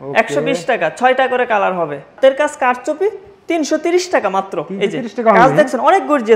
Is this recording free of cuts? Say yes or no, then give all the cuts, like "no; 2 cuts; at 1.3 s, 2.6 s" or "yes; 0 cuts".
no; 1 cut; at 2.2 s